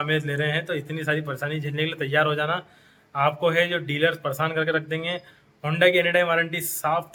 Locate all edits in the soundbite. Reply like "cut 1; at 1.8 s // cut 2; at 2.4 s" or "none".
none